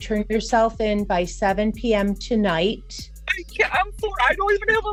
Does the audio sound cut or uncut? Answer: uncut